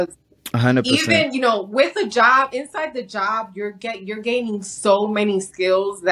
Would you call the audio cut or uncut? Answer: uncut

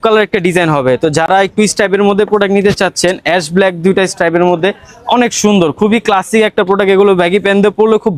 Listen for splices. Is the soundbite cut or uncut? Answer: uncut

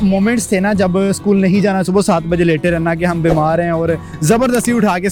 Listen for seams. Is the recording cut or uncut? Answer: uncut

